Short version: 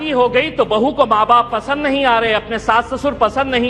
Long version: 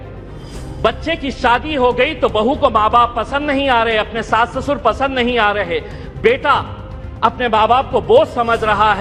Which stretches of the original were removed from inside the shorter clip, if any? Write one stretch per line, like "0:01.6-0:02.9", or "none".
none